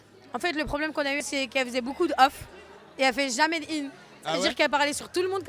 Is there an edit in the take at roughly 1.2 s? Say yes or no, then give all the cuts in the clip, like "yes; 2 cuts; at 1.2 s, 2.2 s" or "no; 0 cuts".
yes; 1 cut; at 1.2 s